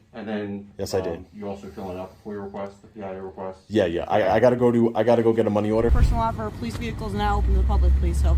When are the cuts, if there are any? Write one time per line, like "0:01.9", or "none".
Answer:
0:05.9

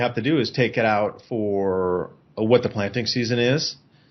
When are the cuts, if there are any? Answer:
none

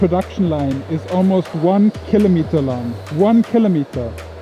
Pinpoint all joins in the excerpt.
none

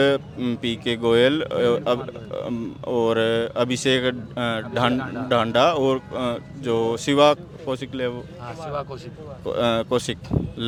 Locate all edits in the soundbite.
none

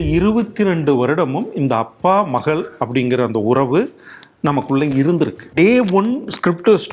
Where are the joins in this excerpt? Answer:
0:05.5

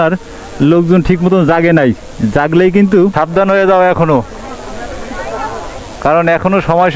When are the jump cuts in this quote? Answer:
none

